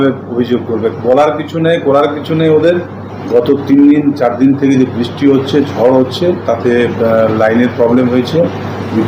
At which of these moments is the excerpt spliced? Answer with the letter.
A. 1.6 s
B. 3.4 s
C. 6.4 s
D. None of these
D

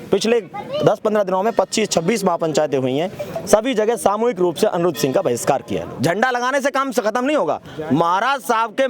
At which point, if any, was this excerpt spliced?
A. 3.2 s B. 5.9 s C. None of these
B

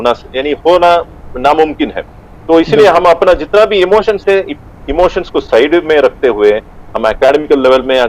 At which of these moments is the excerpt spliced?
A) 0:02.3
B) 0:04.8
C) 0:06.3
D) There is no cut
D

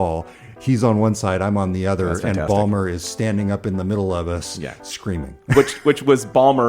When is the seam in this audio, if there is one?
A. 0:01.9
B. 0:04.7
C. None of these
C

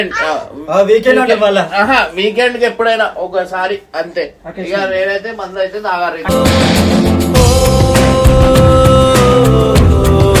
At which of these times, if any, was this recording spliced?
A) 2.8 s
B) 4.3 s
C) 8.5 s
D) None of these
D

